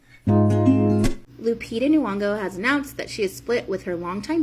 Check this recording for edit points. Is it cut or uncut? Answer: cut